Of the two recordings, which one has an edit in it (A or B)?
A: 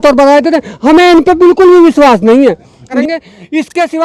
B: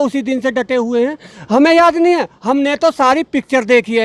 A